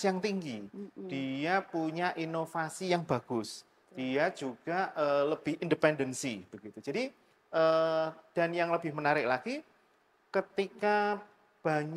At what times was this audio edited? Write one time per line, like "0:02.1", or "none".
none